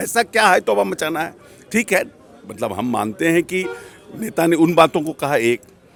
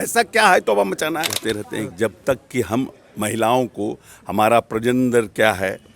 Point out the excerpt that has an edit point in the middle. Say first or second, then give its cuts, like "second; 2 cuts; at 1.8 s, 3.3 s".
second; 1 cut; at 1.3 s